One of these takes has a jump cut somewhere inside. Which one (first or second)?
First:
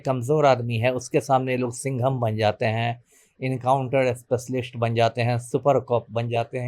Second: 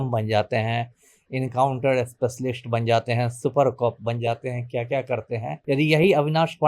second